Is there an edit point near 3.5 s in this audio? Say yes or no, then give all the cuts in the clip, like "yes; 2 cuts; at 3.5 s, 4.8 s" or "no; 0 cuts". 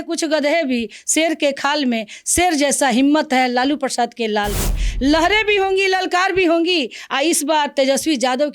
no; 0 cuts